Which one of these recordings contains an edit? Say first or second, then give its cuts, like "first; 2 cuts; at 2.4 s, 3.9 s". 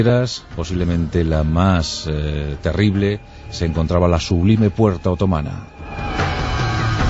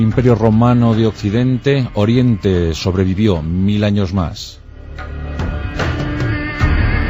first; 1 cut; at 3.5 s